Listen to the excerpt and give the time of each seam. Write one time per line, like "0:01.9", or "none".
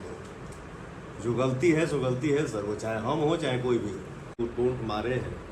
0:04.4